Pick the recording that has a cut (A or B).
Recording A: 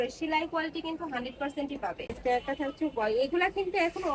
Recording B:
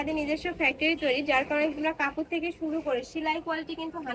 A